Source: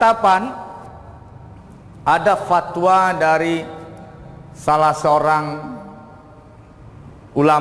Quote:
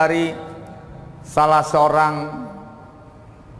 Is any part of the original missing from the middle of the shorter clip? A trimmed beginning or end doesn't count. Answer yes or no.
no